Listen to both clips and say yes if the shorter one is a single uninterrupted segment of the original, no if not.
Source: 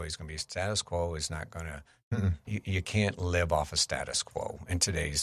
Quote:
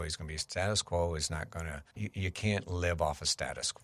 no